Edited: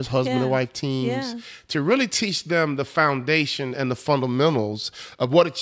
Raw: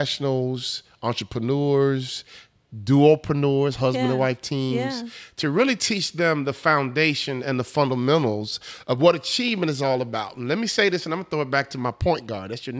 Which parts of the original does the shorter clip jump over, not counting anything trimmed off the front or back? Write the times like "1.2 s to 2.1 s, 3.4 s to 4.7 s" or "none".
none